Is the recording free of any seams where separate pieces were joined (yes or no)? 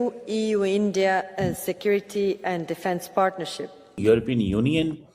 no